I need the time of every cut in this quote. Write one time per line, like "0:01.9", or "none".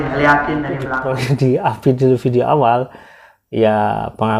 0:01.4